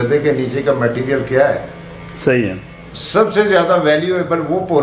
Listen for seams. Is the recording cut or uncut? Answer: uncut